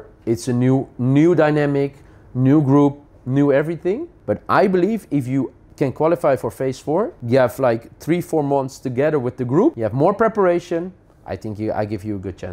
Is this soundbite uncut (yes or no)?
no